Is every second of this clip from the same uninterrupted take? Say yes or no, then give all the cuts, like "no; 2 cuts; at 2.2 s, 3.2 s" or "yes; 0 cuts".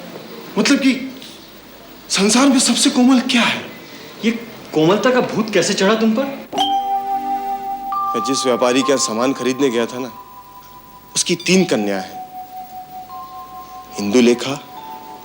yes; 0 cuts